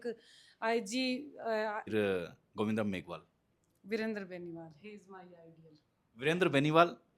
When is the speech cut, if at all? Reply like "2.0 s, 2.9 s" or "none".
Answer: 1.9 s